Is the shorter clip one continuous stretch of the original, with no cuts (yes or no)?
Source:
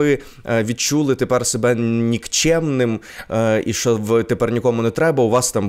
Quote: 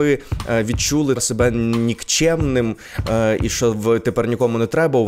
no